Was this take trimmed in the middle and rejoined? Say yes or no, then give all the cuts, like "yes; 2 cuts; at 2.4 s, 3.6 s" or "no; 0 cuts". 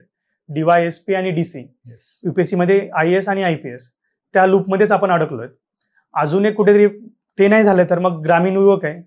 no; 0 cuts